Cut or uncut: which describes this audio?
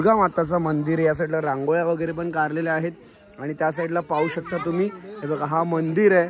uncut